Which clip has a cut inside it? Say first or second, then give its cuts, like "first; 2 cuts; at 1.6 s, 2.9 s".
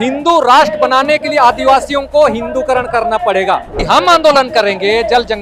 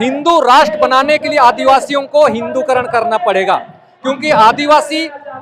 first; 1 cut; at 3.8 s